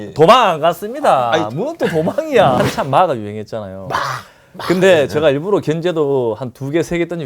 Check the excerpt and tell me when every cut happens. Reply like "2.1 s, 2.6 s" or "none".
2.6 s